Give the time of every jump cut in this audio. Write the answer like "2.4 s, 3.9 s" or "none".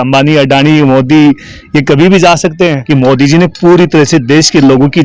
2.8 s